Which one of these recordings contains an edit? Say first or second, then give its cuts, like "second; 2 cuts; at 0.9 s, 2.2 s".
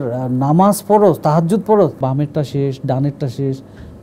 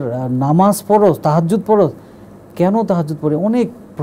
first; 1 cut; at 2.0 s